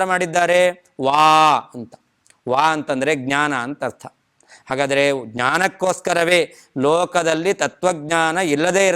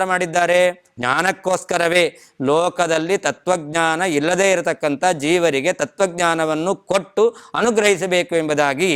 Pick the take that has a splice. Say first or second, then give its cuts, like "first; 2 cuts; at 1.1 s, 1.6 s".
second; 1 cut; at 0.9 s